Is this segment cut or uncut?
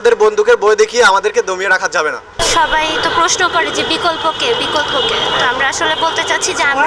uncut